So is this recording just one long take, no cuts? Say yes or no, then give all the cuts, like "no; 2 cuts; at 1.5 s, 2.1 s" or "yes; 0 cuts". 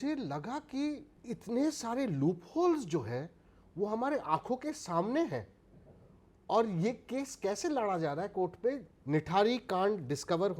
no; 2 cuts; at 1.1 s, 8.9 s